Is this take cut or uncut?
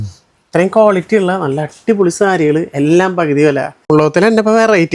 cut